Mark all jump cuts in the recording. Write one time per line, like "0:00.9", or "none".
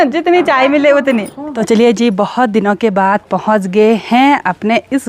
0:01.6